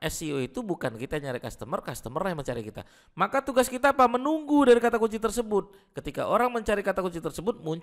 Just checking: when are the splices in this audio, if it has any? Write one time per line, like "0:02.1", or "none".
none